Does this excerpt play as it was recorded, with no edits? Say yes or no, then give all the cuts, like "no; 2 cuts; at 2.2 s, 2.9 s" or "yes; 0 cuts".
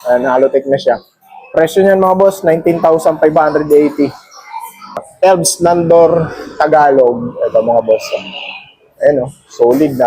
no; 1 cut; at 5.1 s